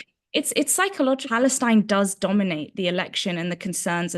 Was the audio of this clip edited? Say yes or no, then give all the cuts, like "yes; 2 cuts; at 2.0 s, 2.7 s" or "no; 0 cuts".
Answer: yes; 1 cut; at 1.3 s